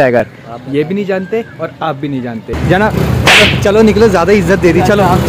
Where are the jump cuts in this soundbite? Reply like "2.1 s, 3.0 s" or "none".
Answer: 2.5 s